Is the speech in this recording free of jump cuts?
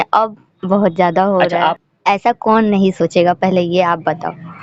no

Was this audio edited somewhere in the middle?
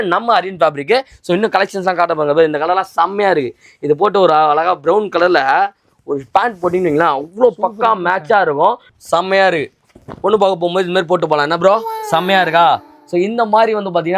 yes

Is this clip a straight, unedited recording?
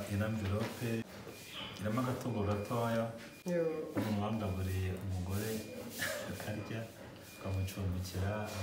no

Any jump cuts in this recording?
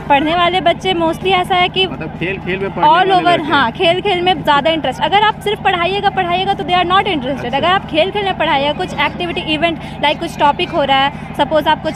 no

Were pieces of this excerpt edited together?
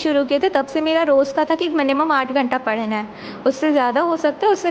no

